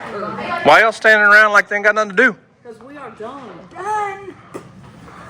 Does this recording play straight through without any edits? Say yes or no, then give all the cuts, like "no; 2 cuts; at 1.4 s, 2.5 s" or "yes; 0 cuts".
yes; 0 cuts